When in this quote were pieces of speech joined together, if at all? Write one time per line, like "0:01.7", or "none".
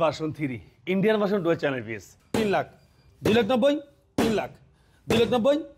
0:02.2

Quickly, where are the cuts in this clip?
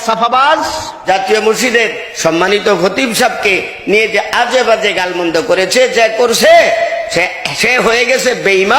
0:01.0

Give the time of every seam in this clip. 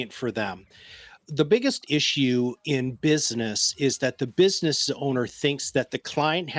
none

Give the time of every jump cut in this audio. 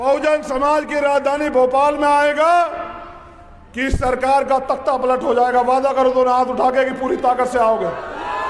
none

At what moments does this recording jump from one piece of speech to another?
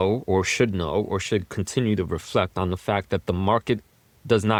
none

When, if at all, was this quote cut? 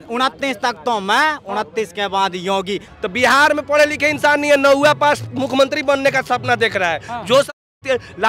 0:02.9

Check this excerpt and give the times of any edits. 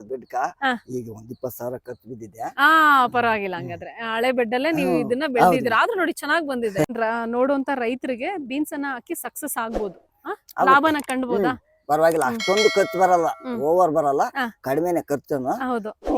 0:06.9

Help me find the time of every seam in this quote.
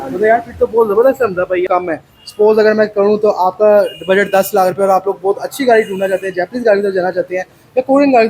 0:01.6

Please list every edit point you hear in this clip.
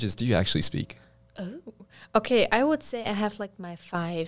none

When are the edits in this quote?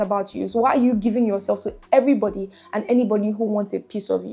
none

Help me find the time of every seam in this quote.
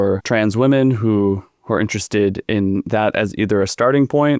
none

